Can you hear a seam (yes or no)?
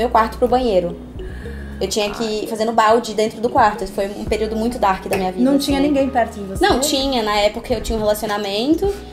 no